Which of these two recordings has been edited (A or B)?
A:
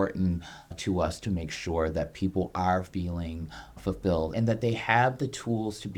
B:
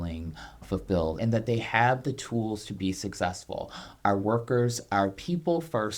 B